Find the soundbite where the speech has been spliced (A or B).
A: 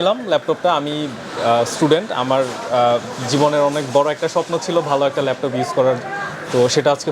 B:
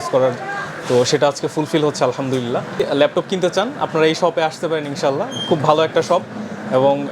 B